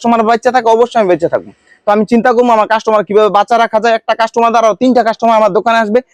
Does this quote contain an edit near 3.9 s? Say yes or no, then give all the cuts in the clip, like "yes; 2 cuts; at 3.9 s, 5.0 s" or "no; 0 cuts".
no; 0 cuts